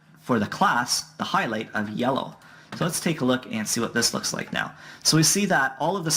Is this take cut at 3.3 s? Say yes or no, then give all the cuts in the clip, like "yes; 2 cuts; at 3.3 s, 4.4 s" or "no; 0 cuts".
no; 1 cut; at 1.9 s